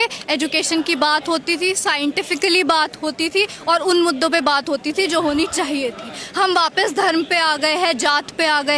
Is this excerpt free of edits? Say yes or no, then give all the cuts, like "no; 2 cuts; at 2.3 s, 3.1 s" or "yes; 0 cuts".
yes; 0 cuts